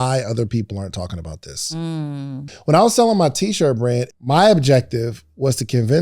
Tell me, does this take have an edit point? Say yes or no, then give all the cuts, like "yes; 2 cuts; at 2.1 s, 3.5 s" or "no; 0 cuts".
yes; 2 cuts; at 2.5 s, 4.1 s